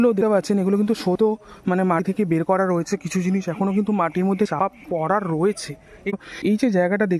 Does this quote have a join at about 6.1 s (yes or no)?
yes